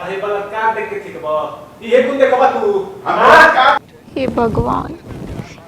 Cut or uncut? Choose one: cut